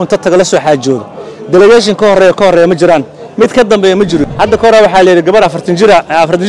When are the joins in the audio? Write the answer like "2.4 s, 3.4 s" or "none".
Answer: 4.3 s

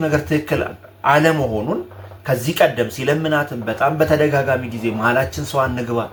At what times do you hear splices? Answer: none

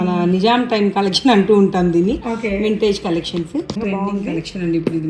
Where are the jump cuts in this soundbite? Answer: 3.7 s

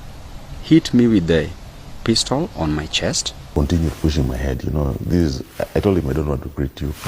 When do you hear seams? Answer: 3.5 s

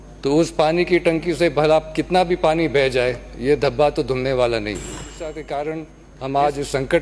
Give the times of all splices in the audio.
5.1 s

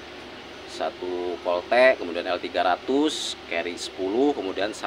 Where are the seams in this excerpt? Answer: none

